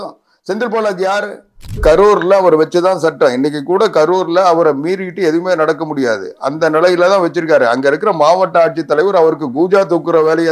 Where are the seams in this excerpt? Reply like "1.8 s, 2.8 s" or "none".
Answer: 1.8 s